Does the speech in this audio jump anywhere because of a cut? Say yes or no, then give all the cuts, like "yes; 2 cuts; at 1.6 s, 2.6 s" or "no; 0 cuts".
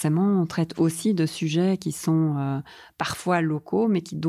no; 0 cuts